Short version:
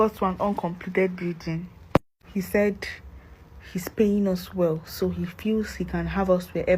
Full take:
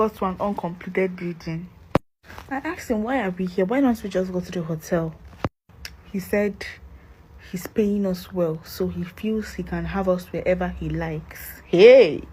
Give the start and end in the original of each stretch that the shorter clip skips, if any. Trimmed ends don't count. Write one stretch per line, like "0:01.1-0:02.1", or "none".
0:02.2-0:06.0